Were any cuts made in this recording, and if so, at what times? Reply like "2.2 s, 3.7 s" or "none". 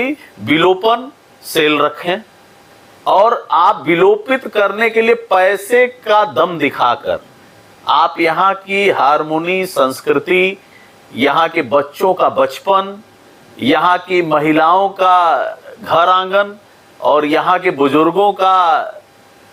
none